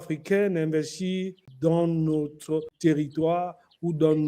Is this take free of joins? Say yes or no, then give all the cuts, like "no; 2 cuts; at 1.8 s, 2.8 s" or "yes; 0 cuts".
no; 2 cuts; at 1.4 s, 2.7 s